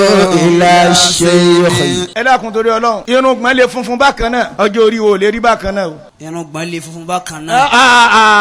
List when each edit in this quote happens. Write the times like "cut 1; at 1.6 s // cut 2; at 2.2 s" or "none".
cut 1; at 2.1 s // cut 2; at 3.0 s // cut 3; at 4.5 s // cut 4; at 6.1 s